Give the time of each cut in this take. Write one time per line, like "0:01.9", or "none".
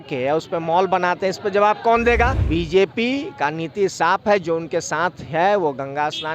0:02.4